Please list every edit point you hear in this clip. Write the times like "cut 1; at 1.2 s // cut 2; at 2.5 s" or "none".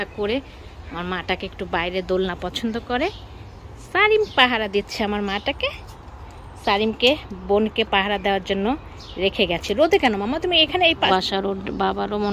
cut 1; at 11.1 s